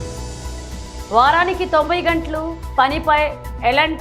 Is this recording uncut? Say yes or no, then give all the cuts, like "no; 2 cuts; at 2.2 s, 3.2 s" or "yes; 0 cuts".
no; 1 cut; at 0.9 s